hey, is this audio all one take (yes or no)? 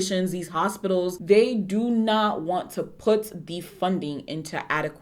no